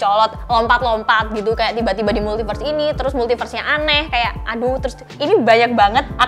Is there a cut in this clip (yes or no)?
yes